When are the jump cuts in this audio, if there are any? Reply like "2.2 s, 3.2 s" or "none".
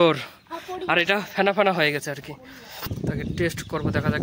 2.9 s